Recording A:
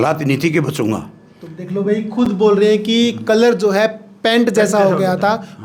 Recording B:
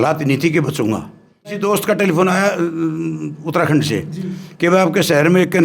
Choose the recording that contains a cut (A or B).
B